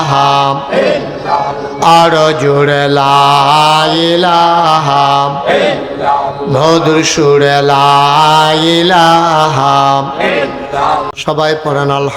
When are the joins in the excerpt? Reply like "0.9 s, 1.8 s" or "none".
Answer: 11.1 s